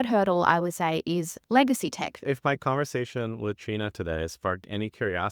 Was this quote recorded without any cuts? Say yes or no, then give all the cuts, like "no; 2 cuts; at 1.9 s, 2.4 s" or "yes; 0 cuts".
no; 1 cut; at 2.2 s